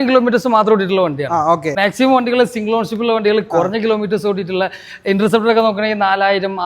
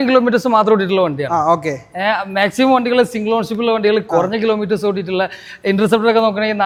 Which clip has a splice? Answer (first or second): first